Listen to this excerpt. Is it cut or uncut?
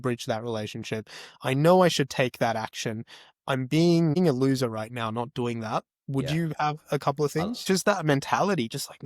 cut